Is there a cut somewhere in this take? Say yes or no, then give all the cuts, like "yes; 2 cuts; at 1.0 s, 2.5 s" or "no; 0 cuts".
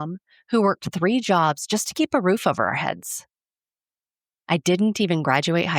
no; 0 cuts